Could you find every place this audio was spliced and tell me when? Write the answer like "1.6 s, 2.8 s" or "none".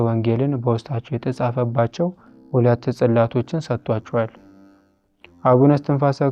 none